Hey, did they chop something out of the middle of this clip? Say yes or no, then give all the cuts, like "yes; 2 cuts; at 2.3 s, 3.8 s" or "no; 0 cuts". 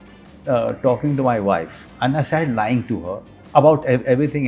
yes; 1 cut; at 1.8 s